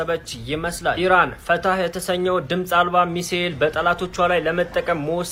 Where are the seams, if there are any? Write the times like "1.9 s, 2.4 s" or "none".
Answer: none